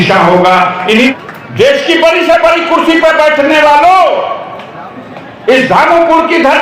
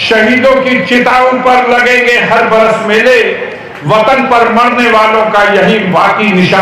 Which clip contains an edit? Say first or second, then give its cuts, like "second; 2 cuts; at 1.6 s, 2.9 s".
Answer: first; 1 cut; at 1.1 s